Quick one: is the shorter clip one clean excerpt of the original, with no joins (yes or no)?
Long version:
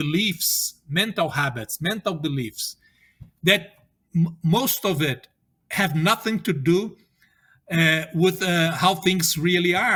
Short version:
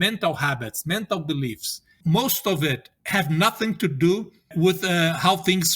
no